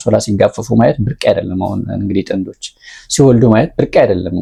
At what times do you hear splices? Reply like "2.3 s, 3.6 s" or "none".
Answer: none